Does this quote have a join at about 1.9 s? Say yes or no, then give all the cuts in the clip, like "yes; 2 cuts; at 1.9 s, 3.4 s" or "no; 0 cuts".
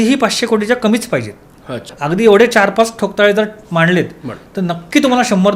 yes; 1 cut; at 1.9 s